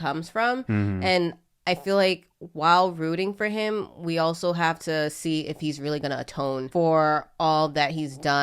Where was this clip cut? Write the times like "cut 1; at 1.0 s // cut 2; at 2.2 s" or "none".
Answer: cut 1; at 6.7 s